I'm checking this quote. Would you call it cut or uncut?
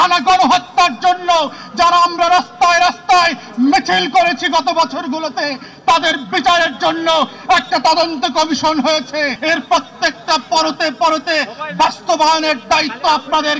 cut